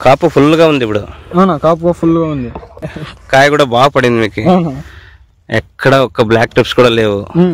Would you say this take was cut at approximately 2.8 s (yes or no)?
yes